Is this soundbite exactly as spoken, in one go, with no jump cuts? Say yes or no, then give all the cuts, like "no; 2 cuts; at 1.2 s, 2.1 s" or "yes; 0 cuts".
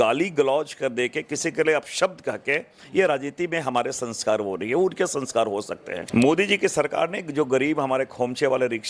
no; 1 cut; at 5.9 s